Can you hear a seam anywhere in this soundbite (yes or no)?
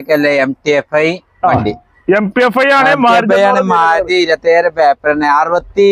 no